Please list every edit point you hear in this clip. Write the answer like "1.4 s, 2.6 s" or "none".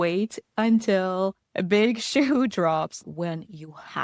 1.5 s, 3.0 s